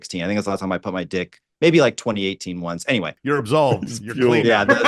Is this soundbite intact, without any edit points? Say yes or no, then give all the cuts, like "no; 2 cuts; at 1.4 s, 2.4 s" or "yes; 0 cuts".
no; 1 cut; at 3.2 s